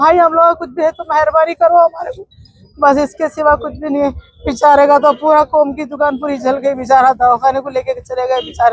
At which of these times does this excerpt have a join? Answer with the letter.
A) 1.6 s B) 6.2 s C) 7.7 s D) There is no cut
D